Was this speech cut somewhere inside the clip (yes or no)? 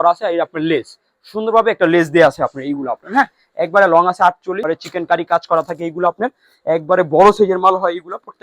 yes